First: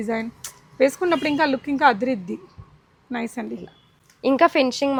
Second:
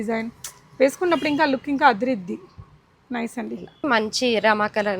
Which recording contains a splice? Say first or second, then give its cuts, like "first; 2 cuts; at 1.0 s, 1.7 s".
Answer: second; 1 cut; at 3.8 s